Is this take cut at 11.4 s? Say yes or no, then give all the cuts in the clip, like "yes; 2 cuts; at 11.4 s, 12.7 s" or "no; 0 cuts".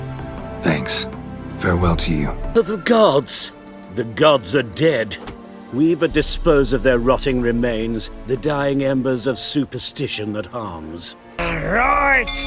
yes; 2 cuts; at 2.5 s, 11.4 s